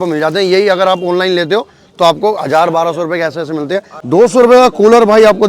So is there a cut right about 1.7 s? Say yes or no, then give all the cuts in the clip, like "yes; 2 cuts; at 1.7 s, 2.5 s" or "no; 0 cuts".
no; 1 cut; at 3.9 s